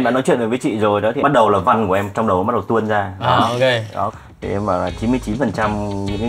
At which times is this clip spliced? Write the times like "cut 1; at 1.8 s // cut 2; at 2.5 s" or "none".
cut 1; at 1.2 s // cut 2; at 4.1 s